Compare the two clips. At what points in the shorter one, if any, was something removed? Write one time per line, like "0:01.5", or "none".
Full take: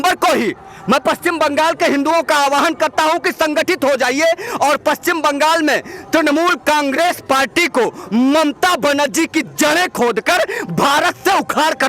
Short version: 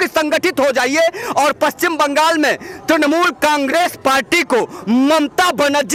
none